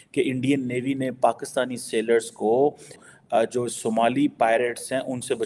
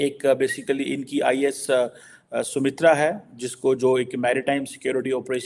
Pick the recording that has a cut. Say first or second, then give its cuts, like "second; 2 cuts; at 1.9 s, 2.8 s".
first; 1 cut; at 3.0 s